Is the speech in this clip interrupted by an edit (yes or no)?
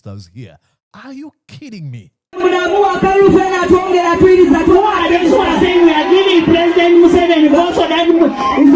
no